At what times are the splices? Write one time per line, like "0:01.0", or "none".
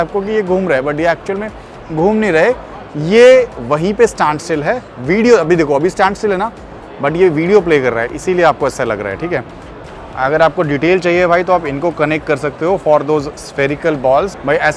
none